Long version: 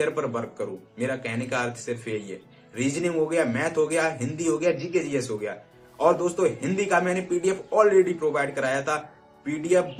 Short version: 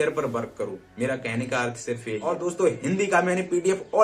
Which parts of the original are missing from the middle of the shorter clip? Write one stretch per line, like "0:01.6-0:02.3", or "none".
0:02.3-0:06.1